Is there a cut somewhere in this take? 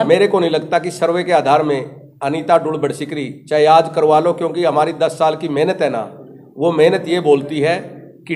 no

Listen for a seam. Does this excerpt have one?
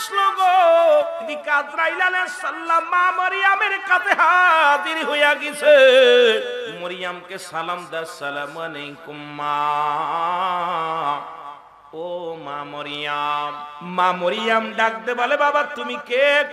yes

